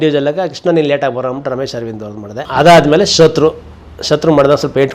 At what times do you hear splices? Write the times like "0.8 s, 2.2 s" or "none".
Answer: 2.4 s